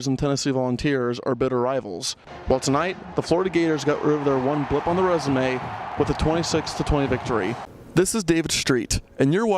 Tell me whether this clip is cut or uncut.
cut